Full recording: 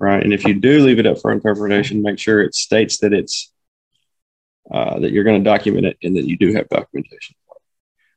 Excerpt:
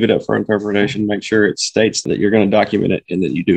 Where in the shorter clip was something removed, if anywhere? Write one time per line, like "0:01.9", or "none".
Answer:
0:02.0